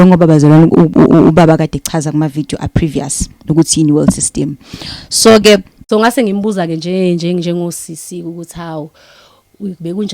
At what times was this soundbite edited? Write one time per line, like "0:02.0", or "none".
0:05.7

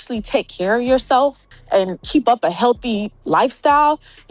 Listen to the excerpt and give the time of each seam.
0:01.5

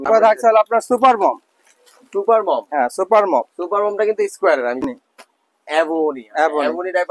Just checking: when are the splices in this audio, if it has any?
0:04.9

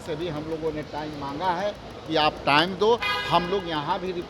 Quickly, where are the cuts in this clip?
none

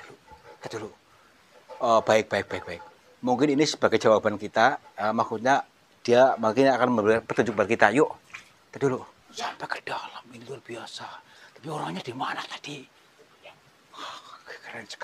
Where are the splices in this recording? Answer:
0:09.2

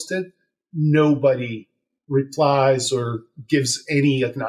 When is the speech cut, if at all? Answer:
none

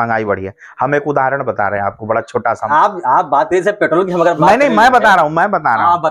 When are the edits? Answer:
0:02.7

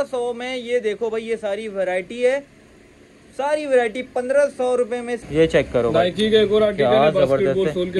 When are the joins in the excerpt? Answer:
0:05.2

